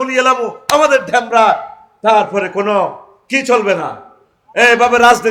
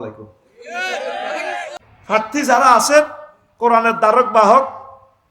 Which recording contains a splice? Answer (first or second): second